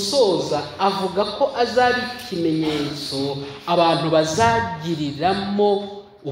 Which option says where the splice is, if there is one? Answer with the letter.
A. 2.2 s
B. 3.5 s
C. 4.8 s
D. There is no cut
D